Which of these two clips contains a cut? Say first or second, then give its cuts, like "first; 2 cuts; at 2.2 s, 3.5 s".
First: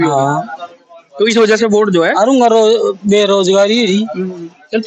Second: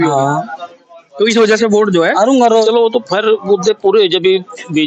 second; 1 cut; at 2.6 s